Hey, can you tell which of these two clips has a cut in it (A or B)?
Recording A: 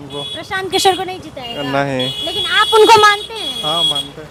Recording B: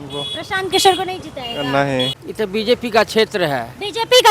B